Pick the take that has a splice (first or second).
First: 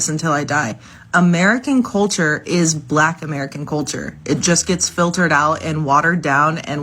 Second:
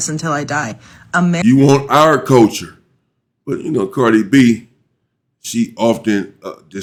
first